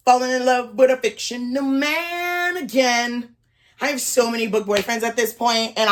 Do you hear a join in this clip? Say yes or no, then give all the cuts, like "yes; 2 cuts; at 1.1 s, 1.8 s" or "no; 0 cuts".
no; 0 cuts